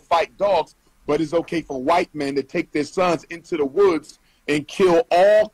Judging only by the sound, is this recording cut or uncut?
uncut